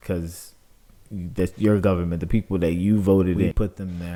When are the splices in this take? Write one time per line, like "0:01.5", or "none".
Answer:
none